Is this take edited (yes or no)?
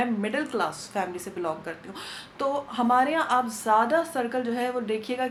no